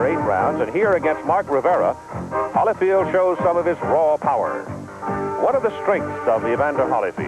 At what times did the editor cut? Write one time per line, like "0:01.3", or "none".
0:06.3